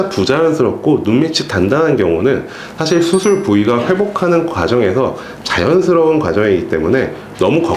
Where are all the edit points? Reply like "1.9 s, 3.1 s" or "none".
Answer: none